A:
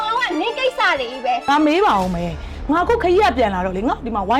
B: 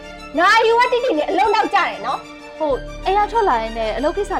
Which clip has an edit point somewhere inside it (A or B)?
A